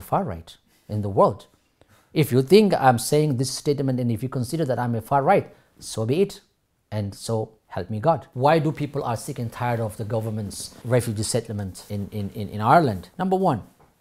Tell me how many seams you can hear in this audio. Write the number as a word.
four